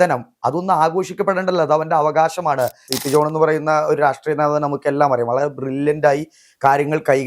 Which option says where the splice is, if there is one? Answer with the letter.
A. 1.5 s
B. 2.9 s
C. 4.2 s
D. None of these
B